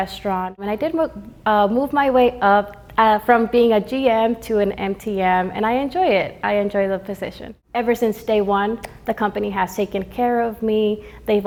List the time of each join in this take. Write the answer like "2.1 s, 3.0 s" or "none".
none